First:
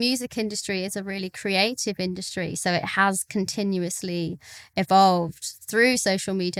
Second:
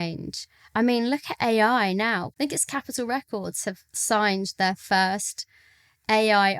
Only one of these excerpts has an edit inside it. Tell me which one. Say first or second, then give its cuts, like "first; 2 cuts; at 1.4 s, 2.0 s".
second; 1 cut; at 2.3 s